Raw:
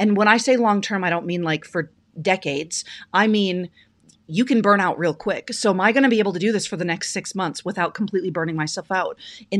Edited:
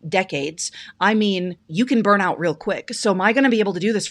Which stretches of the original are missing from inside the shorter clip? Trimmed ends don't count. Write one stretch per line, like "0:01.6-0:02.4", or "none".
0:03.7-0:04.2